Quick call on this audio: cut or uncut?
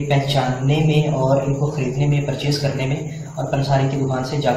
cut